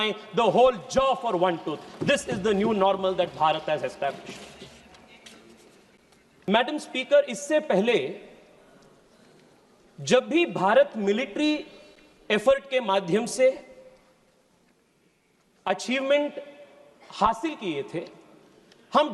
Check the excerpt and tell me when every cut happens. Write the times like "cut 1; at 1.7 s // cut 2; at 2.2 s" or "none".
none